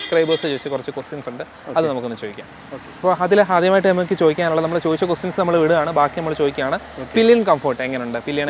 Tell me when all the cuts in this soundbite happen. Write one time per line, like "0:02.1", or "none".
none